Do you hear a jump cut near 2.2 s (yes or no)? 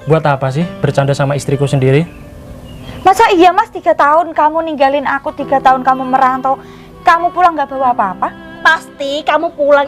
no